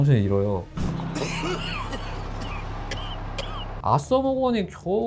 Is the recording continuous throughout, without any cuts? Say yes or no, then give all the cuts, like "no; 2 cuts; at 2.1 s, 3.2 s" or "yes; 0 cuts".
no; 1 cut; at 3.7 s